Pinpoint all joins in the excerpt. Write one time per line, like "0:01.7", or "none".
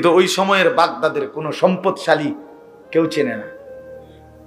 none